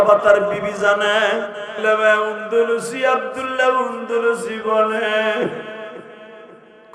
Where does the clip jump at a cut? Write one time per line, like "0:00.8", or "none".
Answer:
0:01.8